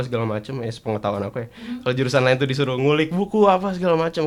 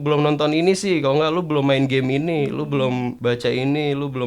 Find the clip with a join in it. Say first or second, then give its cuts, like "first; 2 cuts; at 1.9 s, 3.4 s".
second; 1 cut; at 3.1 s